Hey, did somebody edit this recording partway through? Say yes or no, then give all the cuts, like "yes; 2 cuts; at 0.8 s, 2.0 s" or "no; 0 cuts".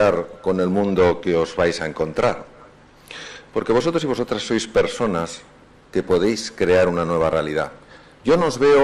no; 0 cuts